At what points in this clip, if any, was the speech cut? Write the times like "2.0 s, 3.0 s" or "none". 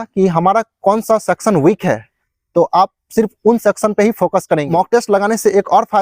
4.7 s